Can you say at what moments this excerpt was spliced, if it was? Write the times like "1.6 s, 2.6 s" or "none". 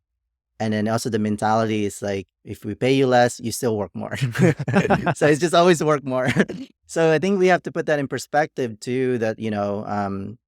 2.4 s